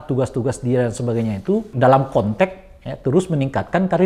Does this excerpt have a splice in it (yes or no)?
yes